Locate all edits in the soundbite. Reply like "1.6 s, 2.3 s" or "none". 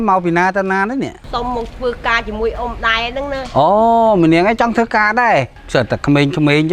1.2 s, 5.6 s